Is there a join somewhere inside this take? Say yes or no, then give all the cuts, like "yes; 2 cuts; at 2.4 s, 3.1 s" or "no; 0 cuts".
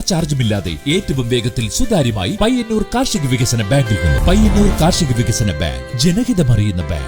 yes; 1 cut; at 4.2 s